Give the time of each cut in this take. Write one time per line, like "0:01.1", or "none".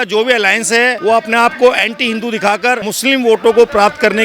0:01.0
0:02.9